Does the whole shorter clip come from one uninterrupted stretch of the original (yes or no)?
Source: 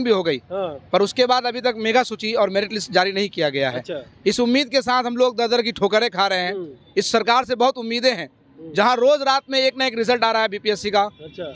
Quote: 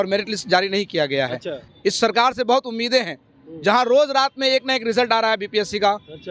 no